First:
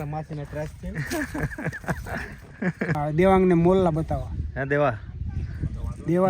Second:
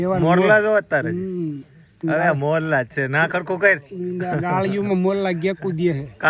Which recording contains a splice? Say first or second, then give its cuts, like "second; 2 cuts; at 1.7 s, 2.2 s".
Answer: first; 1 cut; at 3.0 s